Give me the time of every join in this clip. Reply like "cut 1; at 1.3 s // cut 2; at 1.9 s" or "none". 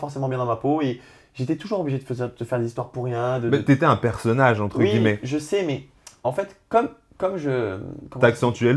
none